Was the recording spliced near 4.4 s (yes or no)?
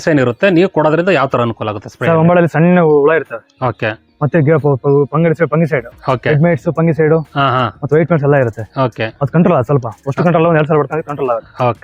no